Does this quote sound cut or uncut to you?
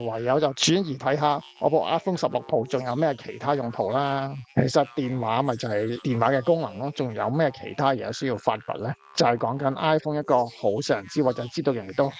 uncut